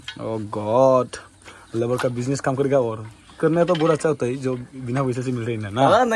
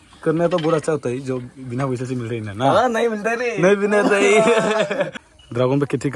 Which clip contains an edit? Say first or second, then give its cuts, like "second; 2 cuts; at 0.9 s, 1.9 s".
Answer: second; 1 cut; at 5.3 s